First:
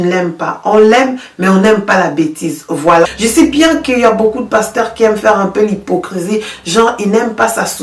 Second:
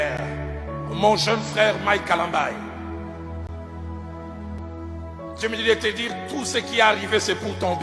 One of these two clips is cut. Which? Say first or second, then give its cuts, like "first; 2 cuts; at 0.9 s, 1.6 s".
first; 1 cut; at 3.1 s